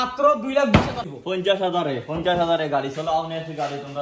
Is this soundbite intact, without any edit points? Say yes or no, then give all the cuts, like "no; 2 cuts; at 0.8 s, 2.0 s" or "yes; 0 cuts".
no; 1 cut; at 1.1 s